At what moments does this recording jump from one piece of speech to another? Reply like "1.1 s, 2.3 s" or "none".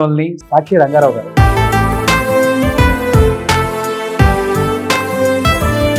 none